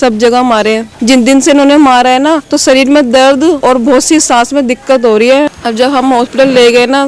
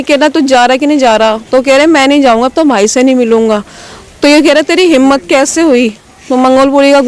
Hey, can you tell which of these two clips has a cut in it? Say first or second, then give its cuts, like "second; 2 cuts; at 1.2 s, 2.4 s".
first; 4 cuts; at 0.9 s, 2.5 s, 3.6 s, 5.5 s